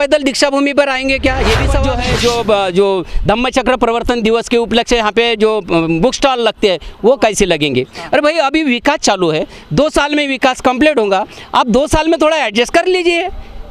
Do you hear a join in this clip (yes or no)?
yes